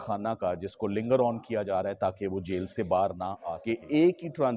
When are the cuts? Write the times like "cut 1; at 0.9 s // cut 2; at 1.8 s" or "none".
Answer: cut 1; at 3.5 s